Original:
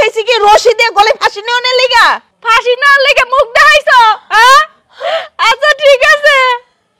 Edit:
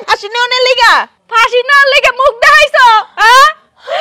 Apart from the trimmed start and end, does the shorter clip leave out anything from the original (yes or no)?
no